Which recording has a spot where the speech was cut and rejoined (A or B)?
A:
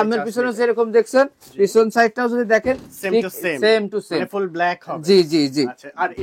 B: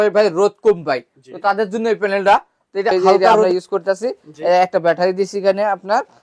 B